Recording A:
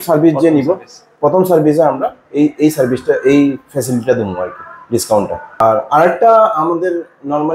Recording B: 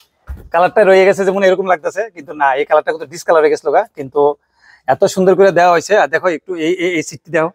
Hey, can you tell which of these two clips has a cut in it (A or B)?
A